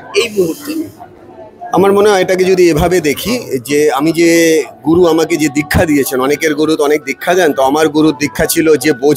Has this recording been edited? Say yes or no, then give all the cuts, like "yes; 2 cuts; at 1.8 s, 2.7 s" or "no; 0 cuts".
no; 0 cuts